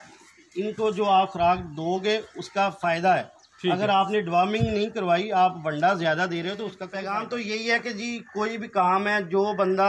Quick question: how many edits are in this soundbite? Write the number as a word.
one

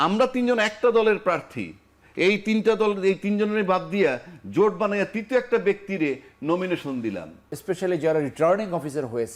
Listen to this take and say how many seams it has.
one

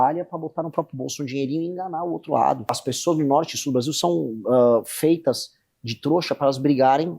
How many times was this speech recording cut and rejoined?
one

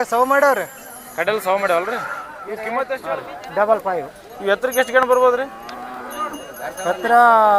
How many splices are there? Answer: one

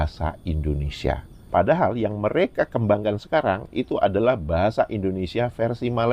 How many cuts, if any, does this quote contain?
one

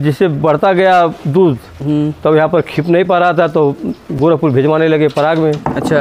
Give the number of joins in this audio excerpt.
zero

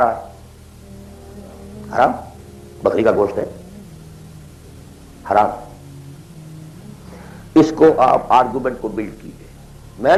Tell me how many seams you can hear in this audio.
zero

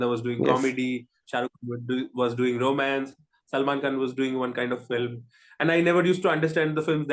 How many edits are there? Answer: zero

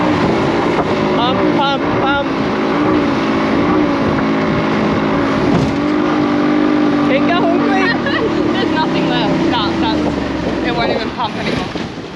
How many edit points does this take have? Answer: zero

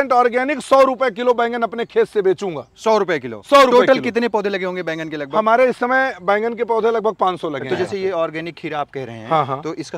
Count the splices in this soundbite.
one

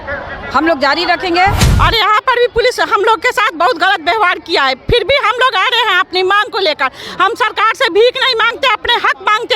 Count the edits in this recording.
one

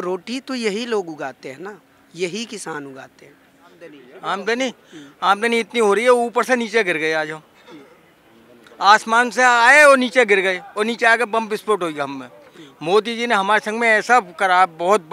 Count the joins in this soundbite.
one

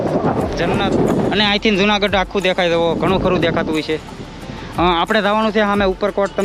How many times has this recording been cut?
zero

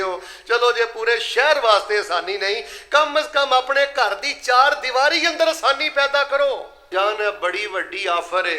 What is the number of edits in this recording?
one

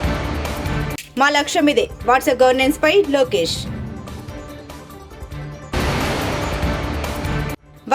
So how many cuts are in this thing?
one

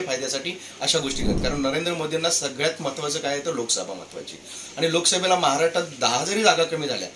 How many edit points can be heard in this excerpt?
one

